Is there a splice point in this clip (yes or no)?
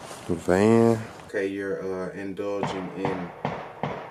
yes